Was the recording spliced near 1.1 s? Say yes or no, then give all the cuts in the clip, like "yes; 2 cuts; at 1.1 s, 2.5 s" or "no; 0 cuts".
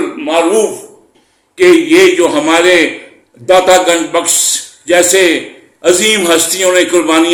no; 0 cuts